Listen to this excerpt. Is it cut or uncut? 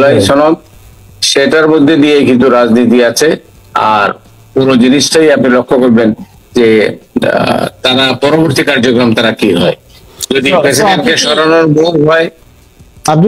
uncut